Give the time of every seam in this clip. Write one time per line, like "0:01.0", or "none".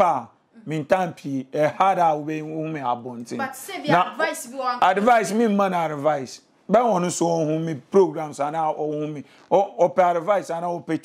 none